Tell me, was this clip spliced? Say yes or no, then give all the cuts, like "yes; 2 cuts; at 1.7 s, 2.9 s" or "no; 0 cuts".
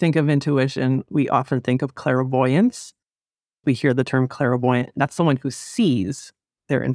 no; 0 cuts